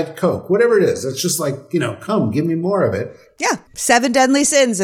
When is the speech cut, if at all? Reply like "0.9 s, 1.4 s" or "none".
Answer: 3.6 s

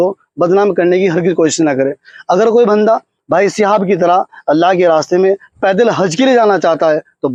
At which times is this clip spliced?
none

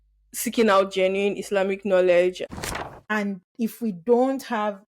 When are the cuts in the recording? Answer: 2.4 s

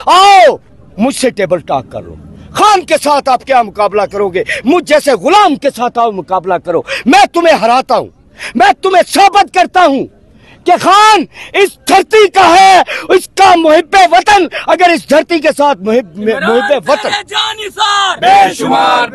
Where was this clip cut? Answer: none

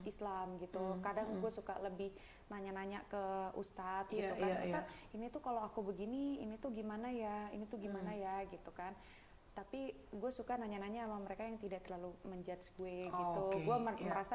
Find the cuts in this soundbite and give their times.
none

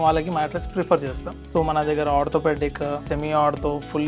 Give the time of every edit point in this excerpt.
1.3 s, 3.0 s

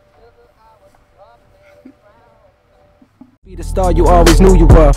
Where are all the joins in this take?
3.4 s

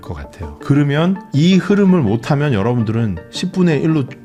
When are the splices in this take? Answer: none

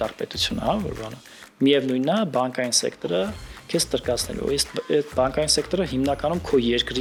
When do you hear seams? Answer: none

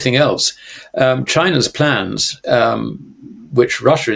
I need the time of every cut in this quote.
none

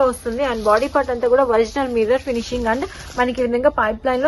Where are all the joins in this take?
none

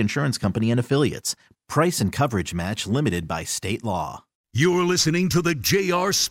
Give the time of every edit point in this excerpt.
4.4 s

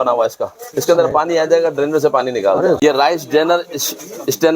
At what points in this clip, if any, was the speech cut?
2.8 s

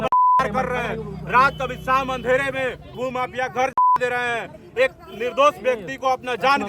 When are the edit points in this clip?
2.9 s

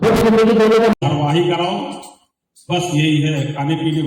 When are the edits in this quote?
1.0 s

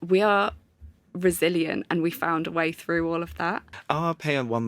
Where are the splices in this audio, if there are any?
3.7 s

